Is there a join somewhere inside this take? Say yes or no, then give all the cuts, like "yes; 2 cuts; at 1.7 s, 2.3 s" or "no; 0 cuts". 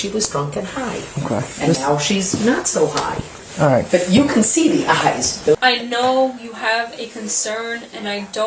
yes; 1 cut; at 5.6 s